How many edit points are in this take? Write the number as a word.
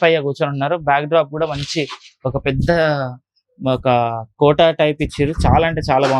zero